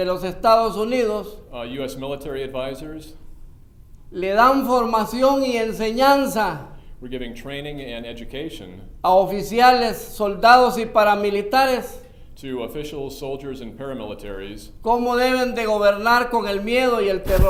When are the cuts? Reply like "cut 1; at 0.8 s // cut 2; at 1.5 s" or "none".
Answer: none